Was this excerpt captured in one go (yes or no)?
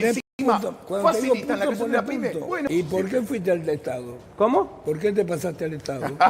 no